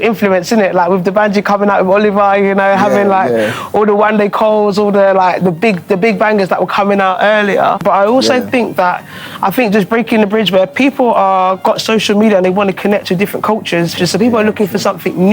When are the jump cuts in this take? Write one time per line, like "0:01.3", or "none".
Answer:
0:07.8
0:13.9